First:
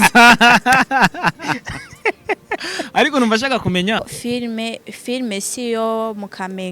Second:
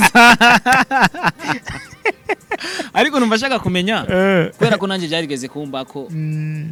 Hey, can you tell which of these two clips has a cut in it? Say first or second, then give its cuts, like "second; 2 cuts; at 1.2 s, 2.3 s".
first; 1 cut; at 4.0 s